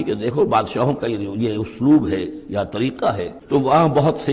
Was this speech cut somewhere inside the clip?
yes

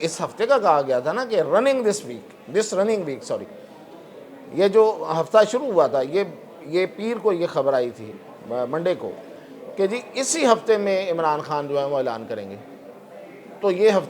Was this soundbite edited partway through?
no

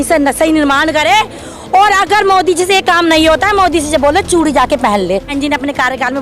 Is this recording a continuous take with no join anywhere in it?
no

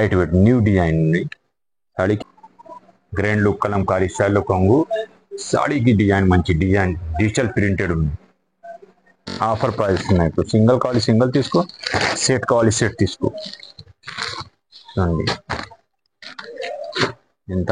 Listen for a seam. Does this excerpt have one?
yes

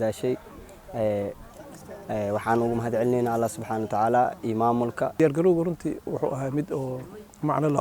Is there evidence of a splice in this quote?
yes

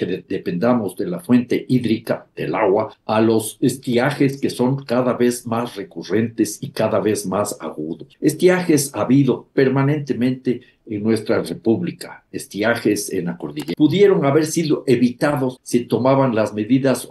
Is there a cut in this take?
yes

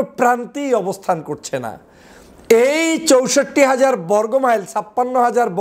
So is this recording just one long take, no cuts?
yes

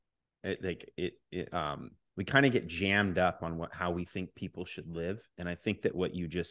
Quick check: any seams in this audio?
no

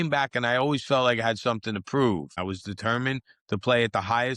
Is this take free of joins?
no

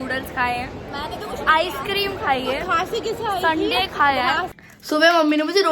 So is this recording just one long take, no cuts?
no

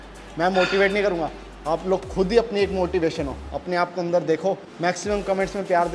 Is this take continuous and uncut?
no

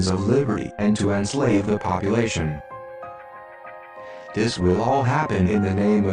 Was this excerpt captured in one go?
yes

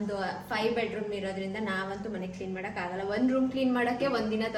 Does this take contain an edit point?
no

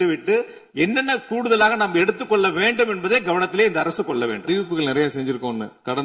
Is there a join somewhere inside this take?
yes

